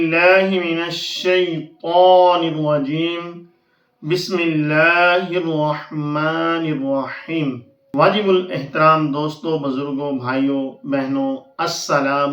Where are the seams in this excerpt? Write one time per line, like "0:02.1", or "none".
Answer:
0:07.7

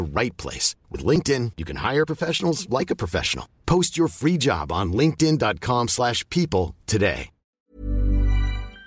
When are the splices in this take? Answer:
0:07.7

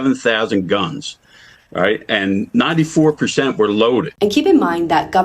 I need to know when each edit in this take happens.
0:04.1

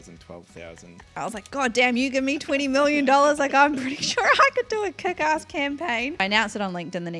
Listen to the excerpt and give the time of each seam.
0:01.2
0:06.2

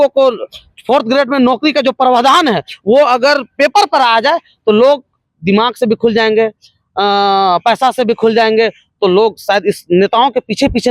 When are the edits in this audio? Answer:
none

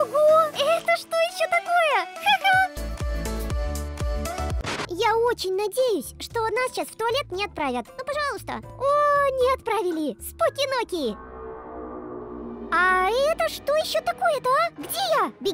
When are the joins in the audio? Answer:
0:02.8
0:04.8

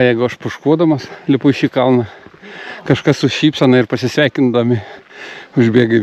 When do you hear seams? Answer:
none

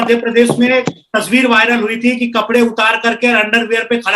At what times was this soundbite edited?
none

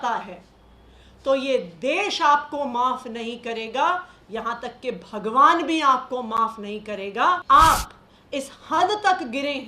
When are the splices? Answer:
0:07.4

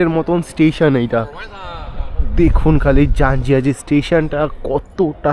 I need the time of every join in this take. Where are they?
none

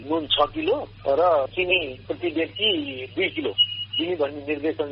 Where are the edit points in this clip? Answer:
none

